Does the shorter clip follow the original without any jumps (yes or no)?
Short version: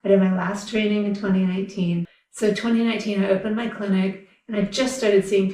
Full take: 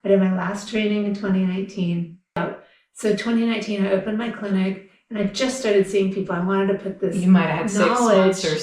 no